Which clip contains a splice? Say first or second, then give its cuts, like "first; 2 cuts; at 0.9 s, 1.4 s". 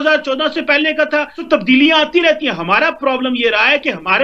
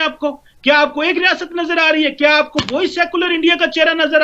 first; 1 cut; at 1.4 s